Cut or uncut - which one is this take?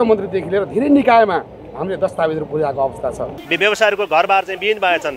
cut